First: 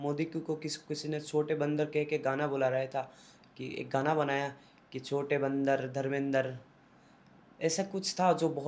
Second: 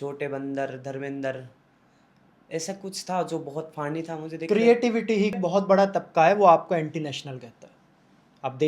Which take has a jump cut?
second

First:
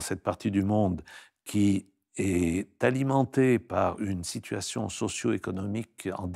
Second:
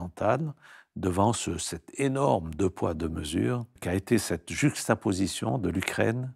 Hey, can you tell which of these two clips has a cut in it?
second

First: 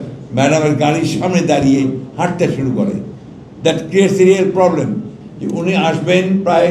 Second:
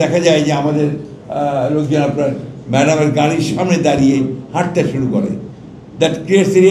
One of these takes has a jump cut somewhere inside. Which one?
first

